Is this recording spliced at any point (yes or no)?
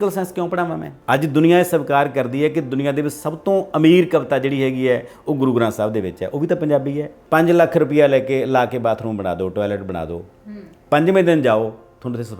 yes